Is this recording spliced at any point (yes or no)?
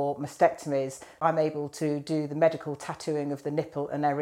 yes